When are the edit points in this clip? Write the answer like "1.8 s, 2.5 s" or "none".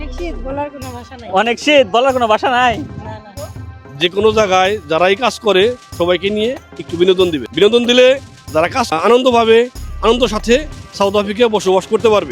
3.8 s, 7.5 s, 8.9 s